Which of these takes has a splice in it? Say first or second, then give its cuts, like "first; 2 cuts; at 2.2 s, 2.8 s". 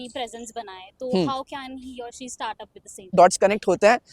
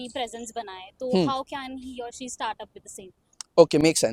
first; 1 cut; at 3.1 s